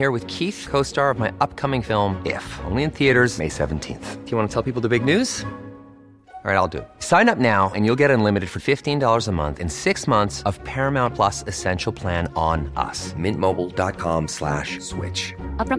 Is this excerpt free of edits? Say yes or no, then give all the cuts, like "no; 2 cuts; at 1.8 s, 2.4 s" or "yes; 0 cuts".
yes; 0 cuts